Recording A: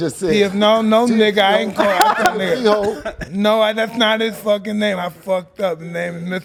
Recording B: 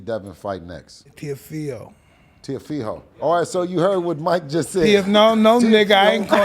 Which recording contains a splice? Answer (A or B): B